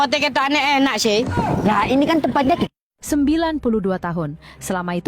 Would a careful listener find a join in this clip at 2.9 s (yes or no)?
yes